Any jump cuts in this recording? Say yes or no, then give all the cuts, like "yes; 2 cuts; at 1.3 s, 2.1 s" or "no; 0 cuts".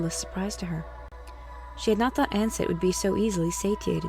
yes; 1 cut; at 3.0 s